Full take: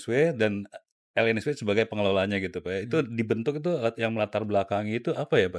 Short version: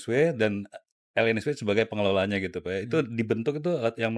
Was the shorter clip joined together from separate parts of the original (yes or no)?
no